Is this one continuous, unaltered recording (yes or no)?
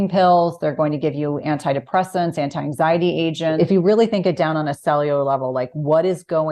no